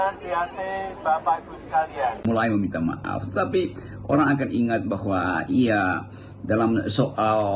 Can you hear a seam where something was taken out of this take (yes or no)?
yes